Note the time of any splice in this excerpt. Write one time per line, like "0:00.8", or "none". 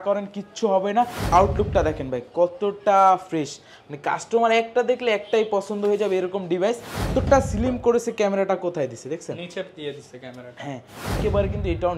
0:01.3
0:07.1
0:11.2